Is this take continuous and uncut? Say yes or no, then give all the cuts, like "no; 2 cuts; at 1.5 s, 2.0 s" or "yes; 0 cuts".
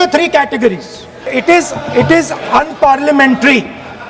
no; 1 cut; at 1.3 s